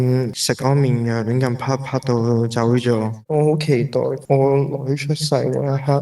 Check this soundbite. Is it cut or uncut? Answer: cut